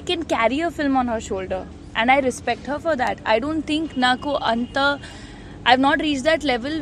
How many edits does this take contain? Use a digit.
0